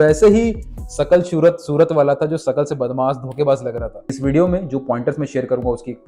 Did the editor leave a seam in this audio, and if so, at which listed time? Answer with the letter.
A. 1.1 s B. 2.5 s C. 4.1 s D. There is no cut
C